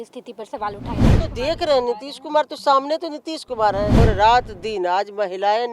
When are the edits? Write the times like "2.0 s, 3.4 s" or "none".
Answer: 1.2 s, 4.0 s